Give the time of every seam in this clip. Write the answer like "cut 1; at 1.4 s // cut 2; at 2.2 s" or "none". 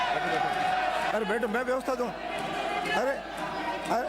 none